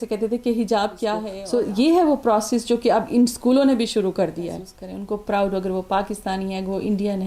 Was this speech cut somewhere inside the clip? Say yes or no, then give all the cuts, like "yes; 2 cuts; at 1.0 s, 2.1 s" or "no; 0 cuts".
yes; 2 cuts; at 1.3 s, 4.7 s